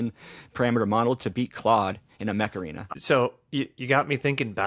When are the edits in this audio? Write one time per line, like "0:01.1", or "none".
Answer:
0:02.8